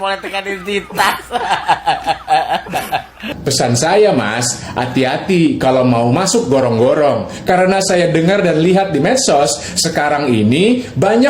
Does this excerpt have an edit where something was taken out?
yes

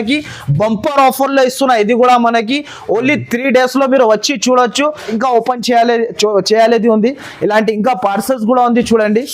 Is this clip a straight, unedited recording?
no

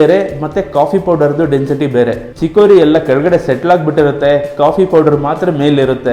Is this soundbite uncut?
no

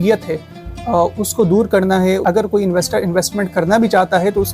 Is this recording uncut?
no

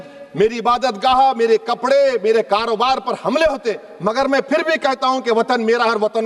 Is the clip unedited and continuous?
yes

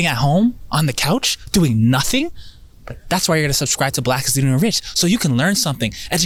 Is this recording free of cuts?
yes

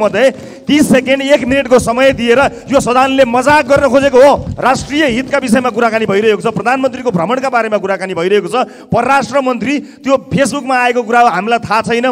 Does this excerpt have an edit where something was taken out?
yes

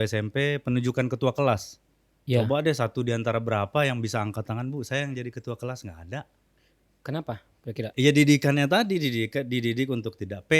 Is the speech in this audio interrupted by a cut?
yes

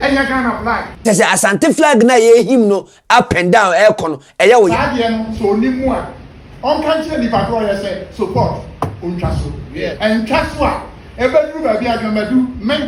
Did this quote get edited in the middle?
yes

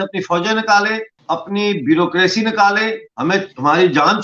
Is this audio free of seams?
no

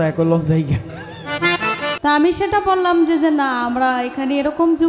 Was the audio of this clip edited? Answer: yes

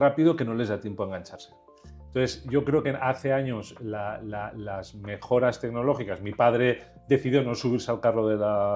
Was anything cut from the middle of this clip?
no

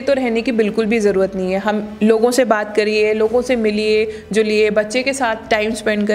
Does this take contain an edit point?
no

